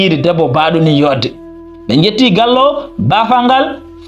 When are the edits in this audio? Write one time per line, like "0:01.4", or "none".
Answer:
0:01.7